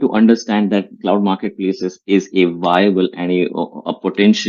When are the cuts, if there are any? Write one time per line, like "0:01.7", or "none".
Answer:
none